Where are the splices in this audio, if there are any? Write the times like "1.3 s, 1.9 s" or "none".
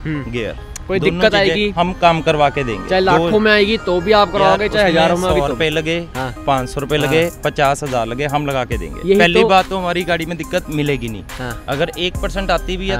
none

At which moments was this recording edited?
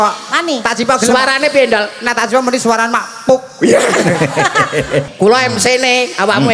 5.1 s

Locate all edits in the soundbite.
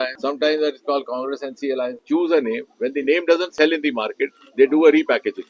2.0 s

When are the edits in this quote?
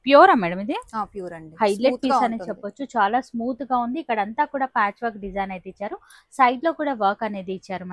none

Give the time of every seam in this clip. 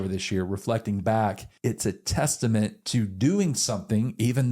1.5 s

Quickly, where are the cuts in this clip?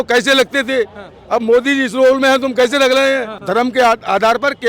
3.4 s

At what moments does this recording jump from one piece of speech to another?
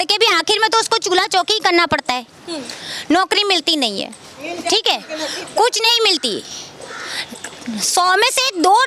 none

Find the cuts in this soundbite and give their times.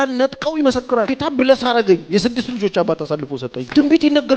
none

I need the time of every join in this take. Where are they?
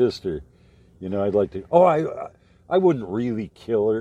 none

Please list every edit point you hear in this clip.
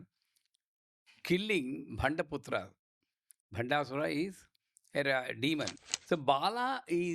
5.7 s

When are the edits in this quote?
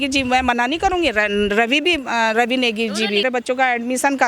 3.2 s

